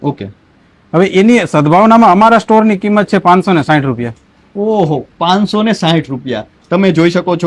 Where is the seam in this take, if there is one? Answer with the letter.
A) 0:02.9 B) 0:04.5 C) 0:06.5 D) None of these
D